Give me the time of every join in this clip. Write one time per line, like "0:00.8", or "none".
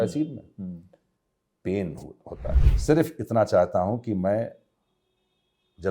0:02.6